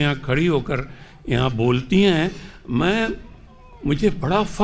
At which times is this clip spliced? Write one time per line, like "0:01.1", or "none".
none